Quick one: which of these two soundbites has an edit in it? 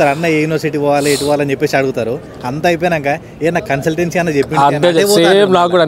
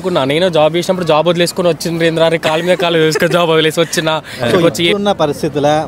second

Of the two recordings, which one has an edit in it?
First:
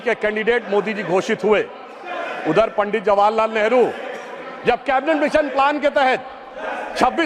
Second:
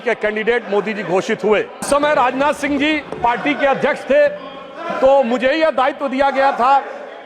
second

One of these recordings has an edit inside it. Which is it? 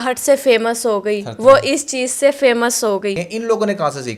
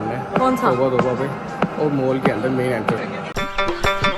first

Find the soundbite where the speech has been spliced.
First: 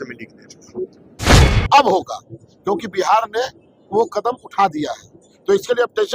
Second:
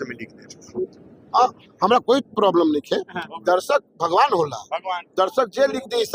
first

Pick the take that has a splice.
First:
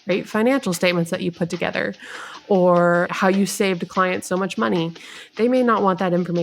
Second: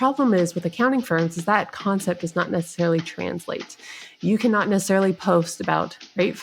first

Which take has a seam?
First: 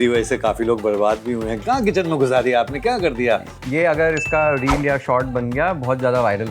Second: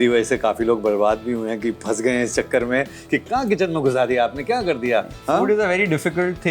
first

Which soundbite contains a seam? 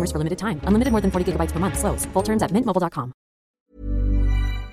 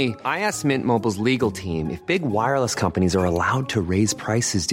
first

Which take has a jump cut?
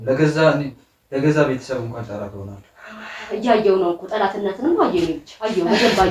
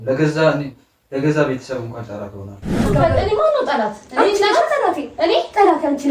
second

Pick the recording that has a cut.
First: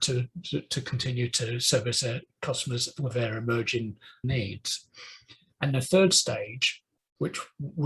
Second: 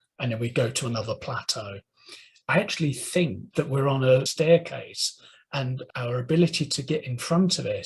second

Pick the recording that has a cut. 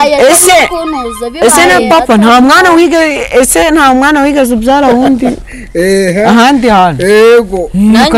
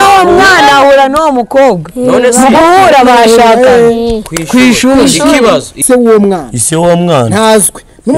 second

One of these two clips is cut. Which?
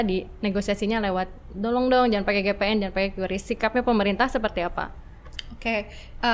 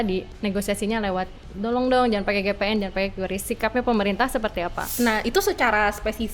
second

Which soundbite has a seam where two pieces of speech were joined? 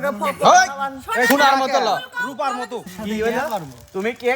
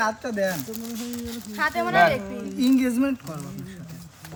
first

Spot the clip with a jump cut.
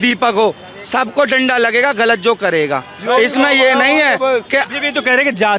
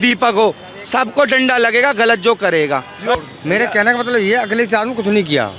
second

